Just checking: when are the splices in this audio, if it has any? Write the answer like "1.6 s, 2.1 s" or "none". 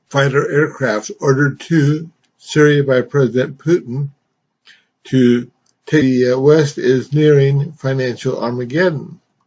none